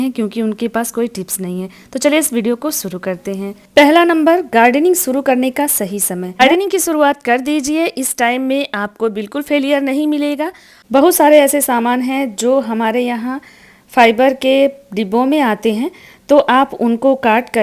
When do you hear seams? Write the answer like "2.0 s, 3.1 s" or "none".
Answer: 6.4 s, 10.7 s